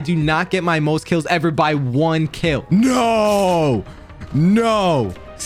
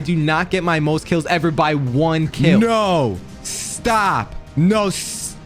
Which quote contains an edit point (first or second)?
second